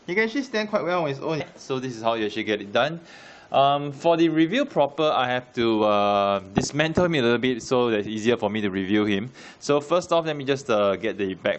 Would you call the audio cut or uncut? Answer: uncut